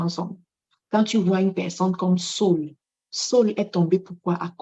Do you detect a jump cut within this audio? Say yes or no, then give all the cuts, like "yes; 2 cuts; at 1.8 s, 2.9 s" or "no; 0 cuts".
no; 0 cuts